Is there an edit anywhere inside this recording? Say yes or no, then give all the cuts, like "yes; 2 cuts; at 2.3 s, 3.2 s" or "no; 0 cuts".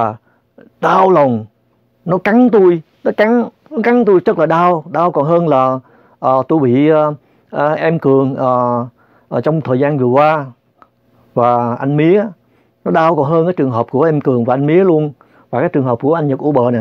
no; 0 cuts